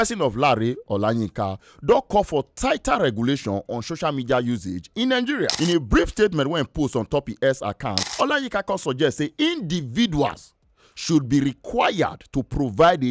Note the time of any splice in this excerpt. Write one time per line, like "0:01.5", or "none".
0:05.5
0:08.0